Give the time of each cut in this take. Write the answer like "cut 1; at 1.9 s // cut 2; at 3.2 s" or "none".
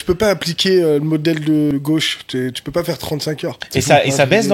cut 1; at 1.7 s // cut 2; at 3.6 s